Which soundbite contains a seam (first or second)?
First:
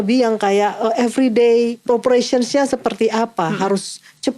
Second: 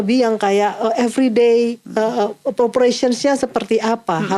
first